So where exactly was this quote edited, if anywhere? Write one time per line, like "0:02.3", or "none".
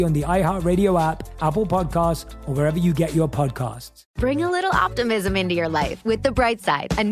none